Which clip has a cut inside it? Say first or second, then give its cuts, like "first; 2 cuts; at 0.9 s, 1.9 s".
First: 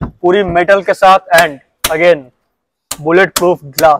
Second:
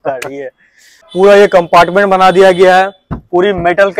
second; 1 cut; at 1.1 s